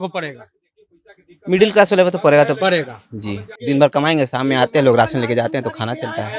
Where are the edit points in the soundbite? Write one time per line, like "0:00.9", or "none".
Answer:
0:03.6